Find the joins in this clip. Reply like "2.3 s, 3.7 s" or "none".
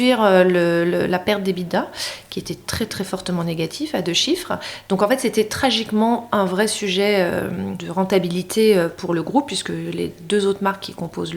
7.8 s